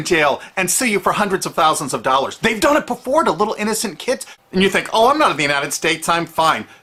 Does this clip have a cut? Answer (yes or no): no